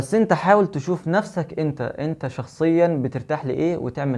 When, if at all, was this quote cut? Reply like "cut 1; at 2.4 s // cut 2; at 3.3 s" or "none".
none